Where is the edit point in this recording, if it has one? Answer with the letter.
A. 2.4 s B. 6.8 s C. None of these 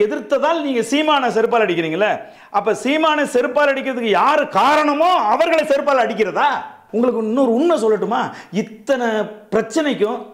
B